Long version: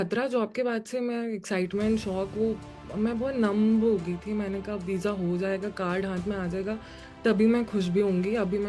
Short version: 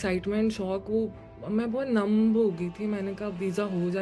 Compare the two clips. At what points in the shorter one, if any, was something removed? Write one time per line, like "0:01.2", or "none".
none